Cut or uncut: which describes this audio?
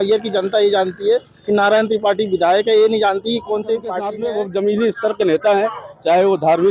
cut